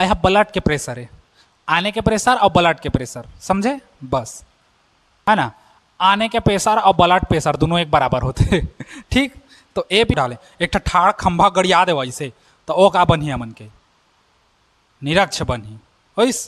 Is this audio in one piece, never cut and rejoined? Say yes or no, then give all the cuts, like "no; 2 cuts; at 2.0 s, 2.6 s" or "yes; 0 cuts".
no; 2 cuts; at 5.3 s, 10.1 s